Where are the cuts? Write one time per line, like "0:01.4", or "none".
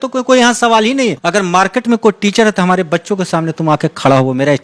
0:01.2